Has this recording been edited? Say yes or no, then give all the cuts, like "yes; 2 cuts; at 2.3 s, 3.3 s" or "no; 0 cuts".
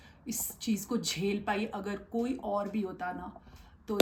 no; 0 cuts